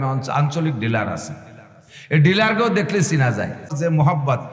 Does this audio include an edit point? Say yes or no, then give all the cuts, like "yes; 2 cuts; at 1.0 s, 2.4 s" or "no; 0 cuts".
yes; 1 cut; at 3.6 s